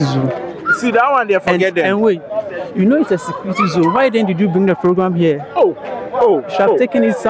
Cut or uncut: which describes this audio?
uncut